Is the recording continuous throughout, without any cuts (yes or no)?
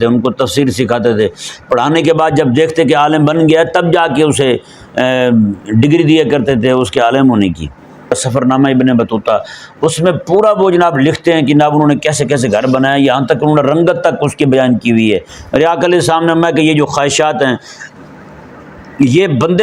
no